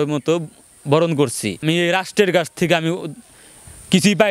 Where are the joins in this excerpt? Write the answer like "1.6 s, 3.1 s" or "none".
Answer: 1.6 s